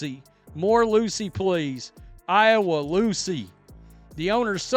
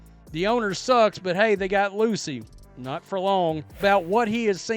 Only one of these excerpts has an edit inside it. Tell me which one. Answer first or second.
second